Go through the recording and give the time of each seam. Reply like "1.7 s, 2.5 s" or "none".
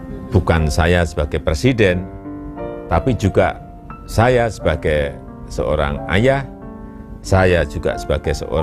none